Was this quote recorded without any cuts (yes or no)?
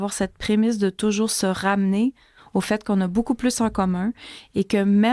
yes